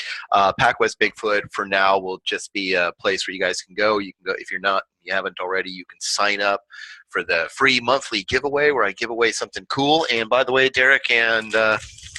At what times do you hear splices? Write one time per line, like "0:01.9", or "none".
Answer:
0:00.9